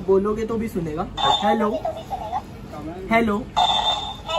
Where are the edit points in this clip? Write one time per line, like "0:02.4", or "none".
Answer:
none